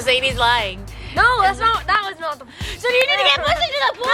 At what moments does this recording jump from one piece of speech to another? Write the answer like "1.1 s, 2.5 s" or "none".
none